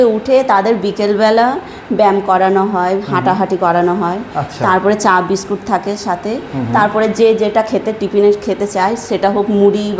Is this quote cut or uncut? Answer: uncut